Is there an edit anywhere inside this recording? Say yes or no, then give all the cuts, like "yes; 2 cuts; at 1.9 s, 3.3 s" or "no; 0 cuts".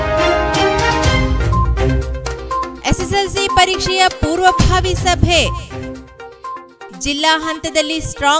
yes; 1 cut; at 2.7 s